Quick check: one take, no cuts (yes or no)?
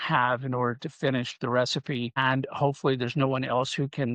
no